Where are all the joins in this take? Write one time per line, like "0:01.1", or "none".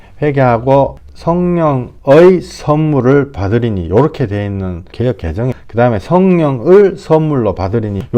none